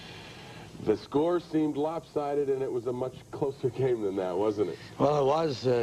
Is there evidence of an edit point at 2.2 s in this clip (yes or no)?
yes